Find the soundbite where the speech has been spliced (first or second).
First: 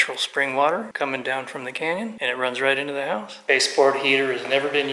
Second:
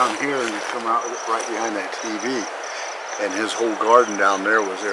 first